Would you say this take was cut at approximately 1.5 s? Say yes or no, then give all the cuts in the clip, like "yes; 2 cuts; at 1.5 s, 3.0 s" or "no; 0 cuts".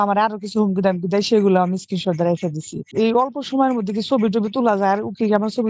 no; 1 cut; at 2.9 s